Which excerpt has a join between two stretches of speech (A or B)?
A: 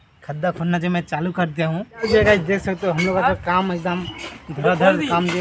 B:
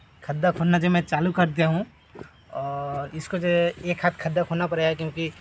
A